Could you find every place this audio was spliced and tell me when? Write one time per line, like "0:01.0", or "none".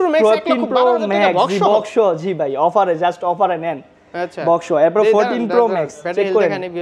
none